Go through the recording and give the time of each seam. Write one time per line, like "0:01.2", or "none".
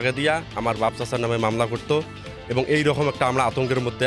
none